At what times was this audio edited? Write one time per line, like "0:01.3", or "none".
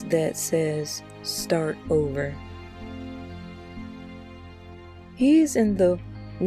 0:02.7
0:05.1